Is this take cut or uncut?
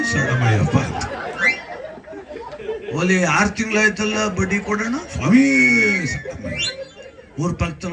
uncut